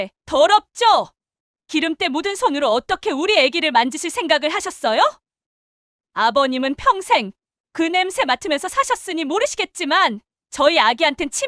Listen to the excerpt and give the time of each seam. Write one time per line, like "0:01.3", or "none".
none